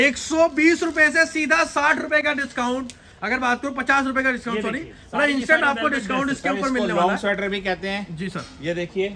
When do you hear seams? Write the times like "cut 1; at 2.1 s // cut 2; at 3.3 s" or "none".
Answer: none